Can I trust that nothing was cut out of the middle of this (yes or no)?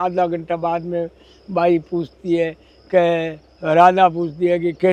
yes